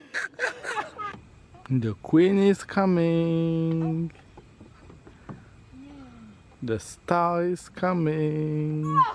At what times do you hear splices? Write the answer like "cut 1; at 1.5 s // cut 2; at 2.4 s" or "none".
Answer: cut 1; at 1.1 s